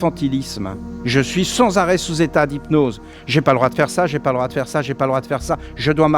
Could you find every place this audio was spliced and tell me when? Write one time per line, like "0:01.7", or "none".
0:01.0

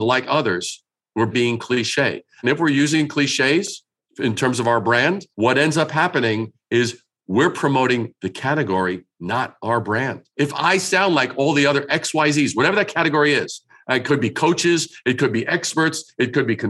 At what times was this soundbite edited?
0:01.3
0:05.3
0:10.2

